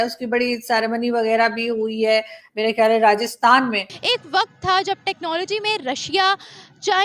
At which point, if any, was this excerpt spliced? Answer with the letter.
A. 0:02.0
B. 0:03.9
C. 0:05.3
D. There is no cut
B